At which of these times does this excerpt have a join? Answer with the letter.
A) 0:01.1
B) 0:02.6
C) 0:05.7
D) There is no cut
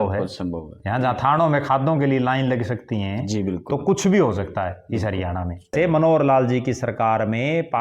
C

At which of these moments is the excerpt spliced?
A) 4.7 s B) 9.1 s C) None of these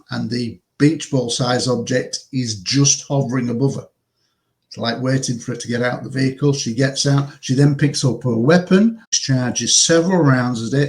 B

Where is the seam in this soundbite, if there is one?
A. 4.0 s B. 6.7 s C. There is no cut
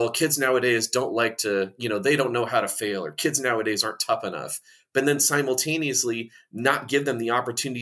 C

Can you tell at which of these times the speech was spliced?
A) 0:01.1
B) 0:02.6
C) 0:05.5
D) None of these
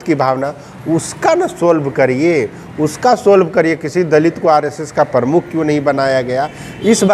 D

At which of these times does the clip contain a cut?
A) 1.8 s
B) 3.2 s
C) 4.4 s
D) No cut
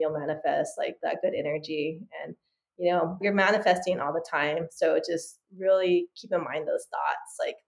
B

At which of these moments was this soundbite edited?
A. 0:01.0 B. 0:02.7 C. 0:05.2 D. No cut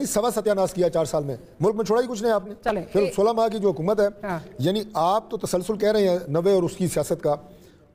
D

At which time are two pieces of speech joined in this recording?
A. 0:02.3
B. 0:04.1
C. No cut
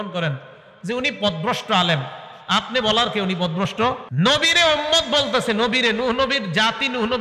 B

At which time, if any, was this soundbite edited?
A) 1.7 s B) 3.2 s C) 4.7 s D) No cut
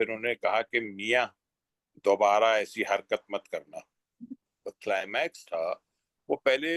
C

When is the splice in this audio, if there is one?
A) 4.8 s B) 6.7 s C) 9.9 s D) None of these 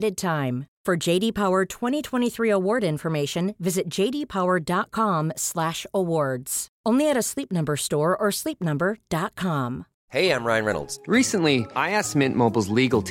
C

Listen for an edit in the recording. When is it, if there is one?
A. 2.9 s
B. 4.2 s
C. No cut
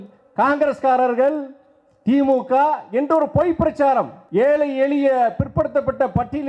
B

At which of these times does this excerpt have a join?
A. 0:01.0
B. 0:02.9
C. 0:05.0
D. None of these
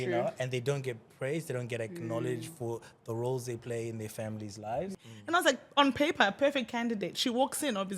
C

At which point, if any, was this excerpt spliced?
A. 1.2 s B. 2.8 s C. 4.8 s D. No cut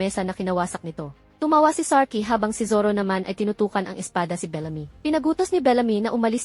C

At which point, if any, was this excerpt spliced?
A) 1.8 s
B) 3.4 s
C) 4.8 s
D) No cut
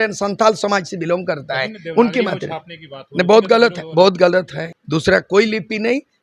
C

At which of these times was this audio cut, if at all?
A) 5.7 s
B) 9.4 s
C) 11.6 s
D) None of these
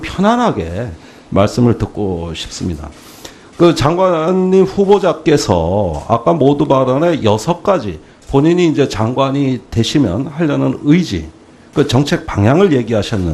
B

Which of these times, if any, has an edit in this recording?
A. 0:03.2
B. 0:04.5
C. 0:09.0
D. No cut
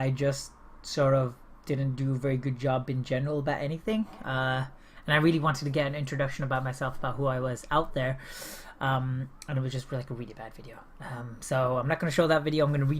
C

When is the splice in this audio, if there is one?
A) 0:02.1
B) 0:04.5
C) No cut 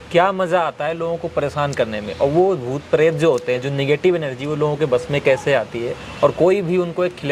C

